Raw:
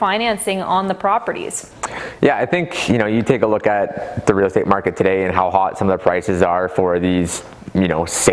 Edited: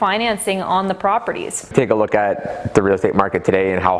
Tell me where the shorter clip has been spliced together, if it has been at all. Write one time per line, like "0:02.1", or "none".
0:01.7